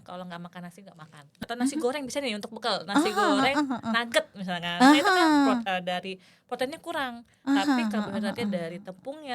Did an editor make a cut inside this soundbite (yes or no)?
yes